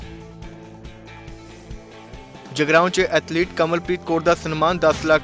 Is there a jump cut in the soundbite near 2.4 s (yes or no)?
yes